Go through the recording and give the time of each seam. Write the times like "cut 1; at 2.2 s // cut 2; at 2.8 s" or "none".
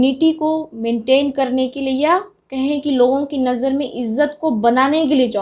none